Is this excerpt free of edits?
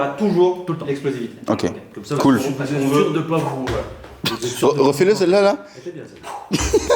yes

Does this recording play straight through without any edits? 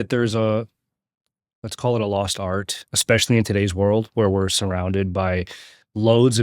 no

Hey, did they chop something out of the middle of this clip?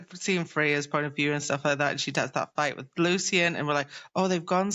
no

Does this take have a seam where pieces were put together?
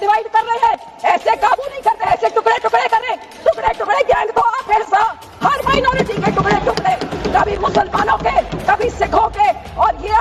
no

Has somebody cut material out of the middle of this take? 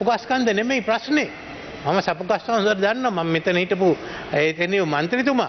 no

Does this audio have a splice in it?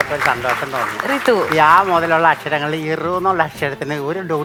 no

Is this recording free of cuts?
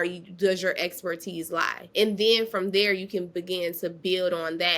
no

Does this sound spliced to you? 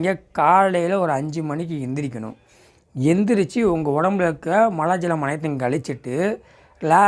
no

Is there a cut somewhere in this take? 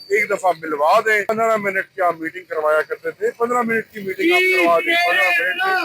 yes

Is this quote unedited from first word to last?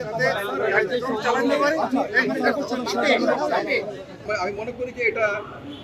no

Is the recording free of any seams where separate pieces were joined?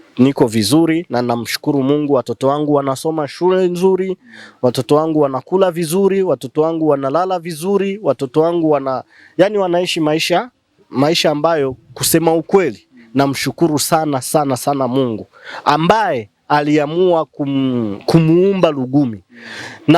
yes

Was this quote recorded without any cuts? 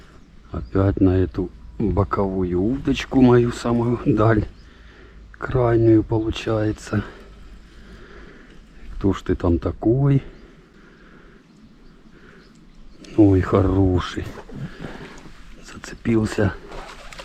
no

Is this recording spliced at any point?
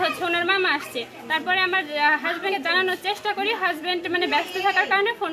no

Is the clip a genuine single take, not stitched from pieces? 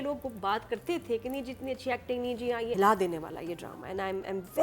no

